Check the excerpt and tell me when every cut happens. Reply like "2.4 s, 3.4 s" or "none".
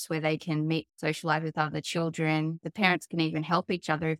0.9 s